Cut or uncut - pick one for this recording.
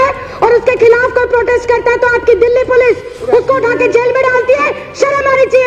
uncut